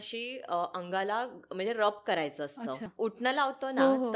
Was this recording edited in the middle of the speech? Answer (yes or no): yes